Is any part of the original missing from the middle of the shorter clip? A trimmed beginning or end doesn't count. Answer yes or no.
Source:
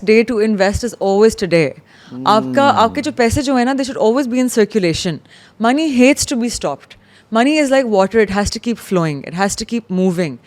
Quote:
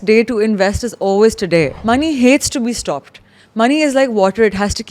yes